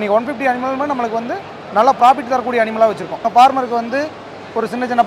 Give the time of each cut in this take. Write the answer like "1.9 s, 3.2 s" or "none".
3.3 s